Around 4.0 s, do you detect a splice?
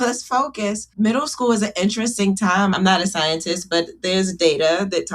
yes; 3 cuts; at 0.9 s, 2.8 s, 4.0 s

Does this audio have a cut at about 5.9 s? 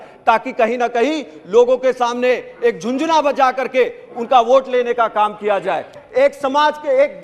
yes; 1 cut; at 5.9 s

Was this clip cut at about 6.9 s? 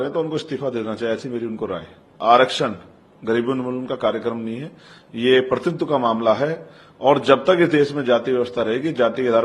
no; 1 cut; at 2.1 s

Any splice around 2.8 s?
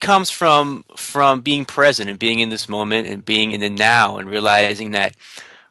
no; 1 cut; at 4.2 s

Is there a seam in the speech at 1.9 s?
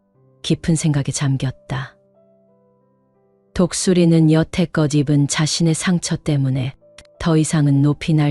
yes; 2 cuts; at 1.9 s, 3.5 s

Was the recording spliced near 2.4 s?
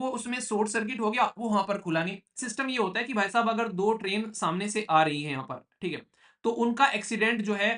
yes; 1 cut; at 2.4 s

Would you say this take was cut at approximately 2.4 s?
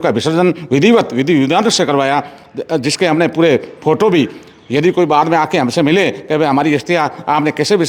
no; 0 cuts

